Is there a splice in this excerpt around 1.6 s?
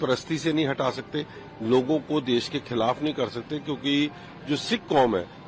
no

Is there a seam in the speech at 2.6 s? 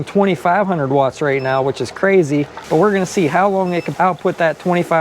yes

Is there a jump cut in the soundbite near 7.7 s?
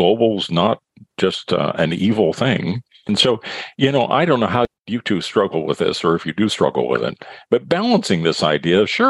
no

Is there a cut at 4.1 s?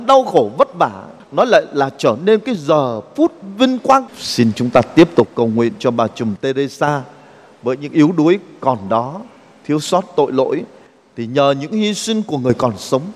yes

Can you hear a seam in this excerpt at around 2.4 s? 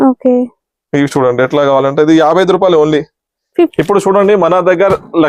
no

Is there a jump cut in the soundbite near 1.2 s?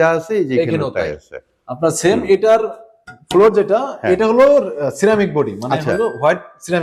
no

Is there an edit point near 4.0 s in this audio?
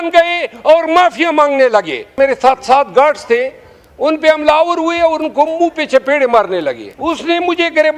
no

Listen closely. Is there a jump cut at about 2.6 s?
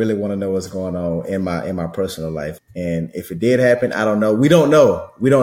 yes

